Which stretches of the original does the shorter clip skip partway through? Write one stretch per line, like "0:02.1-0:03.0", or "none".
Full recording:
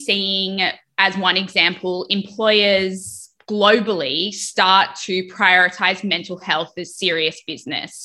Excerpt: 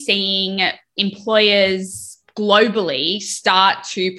0:00.9-0:02.0

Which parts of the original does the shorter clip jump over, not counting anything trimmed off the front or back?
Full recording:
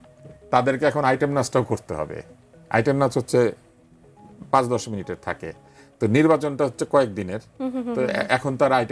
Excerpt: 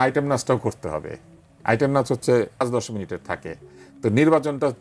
0:03.7-0:04.6

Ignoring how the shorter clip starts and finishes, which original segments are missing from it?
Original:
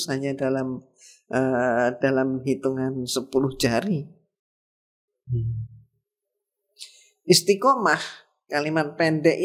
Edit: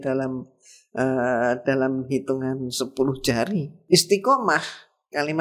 0:04.1-0:07.1

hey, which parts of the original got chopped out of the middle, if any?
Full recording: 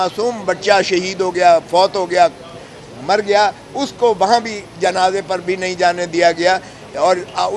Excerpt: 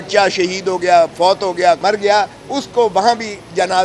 0:02.3-0:03.0

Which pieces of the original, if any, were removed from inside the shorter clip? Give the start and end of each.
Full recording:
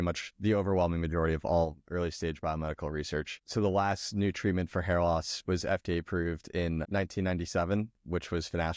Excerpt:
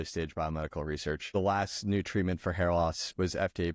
0:03.4-0:03.6

